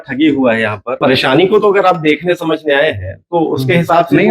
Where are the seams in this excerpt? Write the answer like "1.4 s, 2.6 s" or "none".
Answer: 1.0 s